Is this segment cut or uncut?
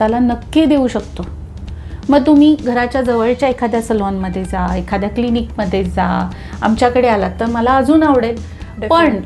uncut